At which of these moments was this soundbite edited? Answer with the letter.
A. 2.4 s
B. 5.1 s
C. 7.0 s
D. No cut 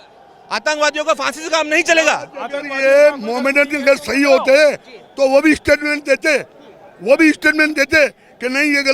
D